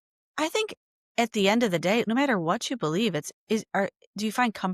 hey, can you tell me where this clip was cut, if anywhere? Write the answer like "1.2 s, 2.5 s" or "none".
2.1 s